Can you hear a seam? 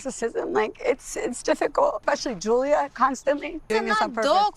yes; 2 cuts; at 2.0 s, 3.7 s

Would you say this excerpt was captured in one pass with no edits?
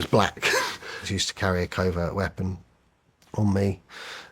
no; 1 cut; at 1.1 s

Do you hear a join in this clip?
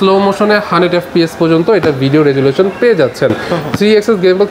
no; 0 cuts

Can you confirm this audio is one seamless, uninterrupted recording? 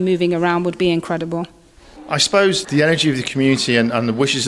yes; 0 cuts

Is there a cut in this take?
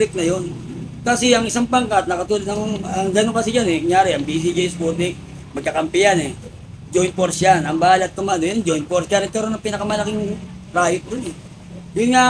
no; 0 cuts

